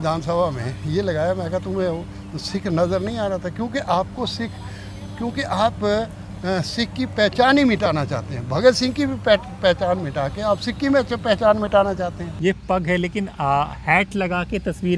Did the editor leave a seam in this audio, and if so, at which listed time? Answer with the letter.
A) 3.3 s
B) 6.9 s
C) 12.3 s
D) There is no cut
C